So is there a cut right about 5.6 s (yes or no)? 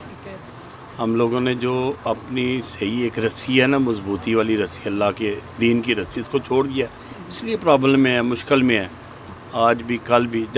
no